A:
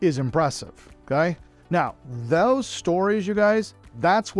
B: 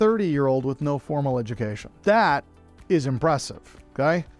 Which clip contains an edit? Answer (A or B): B